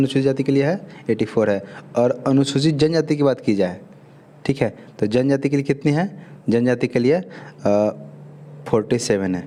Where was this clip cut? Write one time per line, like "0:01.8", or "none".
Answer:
none